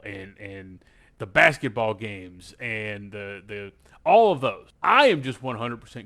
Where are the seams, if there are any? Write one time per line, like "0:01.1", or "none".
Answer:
0:04.7